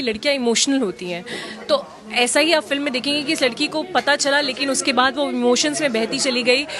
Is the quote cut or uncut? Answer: uncut